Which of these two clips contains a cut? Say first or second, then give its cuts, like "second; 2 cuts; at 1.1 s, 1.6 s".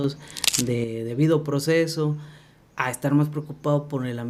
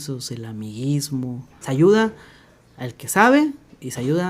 second; 1 cut; at 1.5 s